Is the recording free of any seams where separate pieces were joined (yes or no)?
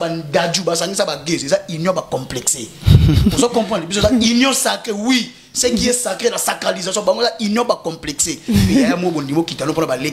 yes